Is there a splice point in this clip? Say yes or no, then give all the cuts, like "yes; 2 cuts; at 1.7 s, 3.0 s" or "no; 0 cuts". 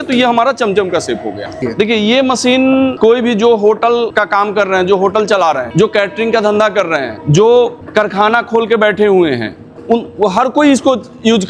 yes; 6 cuts; at 1.6 s, 2.9 s, 4.1 s, 5.7 s, 7.2 s, 7.8 s